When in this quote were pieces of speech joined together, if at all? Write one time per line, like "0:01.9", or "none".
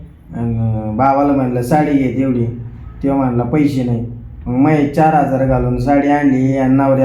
none

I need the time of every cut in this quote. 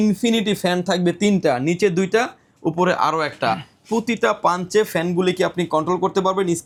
none

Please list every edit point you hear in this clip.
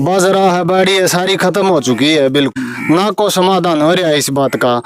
0:02.5

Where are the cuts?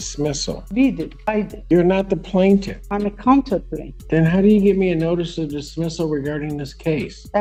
none

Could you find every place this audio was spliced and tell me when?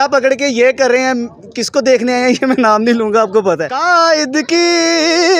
0:03.7

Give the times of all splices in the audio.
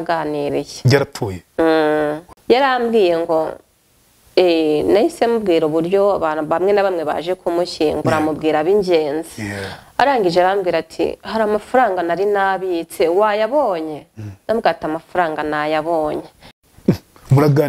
0:02.3
0:16.5

